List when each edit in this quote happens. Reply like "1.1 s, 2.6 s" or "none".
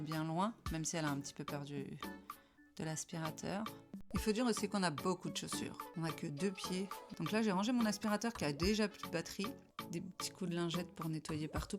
4.0 s, 5.8 s, 7.0 s, 9.7 s